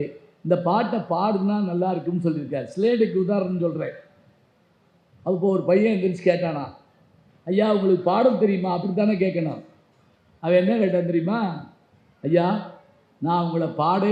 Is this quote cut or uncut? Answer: uncut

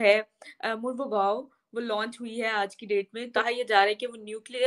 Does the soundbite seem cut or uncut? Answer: uncut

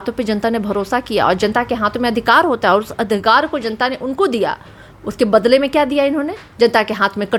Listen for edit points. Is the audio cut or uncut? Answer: uncut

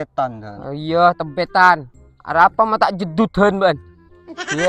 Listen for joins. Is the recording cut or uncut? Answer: uncut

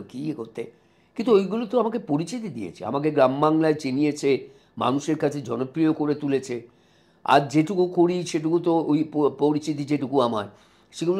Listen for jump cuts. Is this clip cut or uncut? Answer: uncut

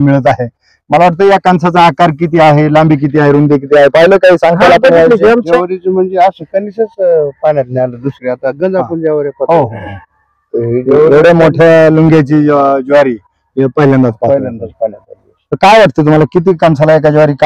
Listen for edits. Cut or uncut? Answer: cut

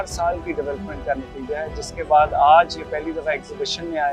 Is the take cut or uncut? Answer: uncut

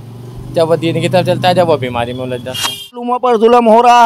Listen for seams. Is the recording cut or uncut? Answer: cut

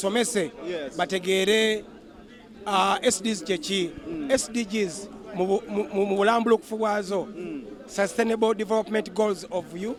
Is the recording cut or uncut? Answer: uncut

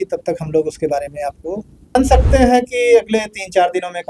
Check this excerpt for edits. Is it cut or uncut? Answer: cut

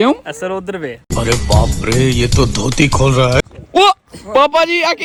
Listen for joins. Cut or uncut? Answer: uncut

